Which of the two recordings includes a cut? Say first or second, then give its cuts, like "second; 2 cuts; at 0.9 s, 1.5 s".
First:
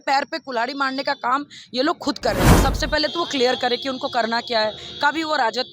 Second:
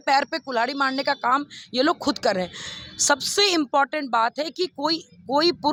first; 1 cut; at 2.6 s